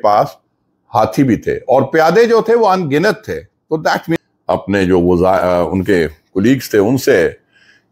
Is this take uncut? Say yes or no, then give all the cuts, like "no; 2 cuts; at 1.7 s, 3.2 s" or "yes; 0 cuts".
no; 1 cut; at 4.1 s